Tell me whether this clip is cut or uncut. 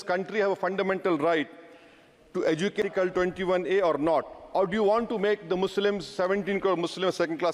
cut